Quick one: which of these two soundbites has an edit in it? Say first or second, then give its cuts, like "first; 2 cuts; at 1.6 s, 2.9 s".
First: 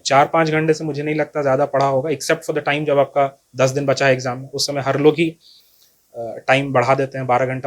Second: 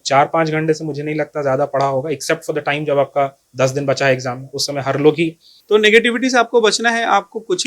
second; 1 cut; at 5.5 s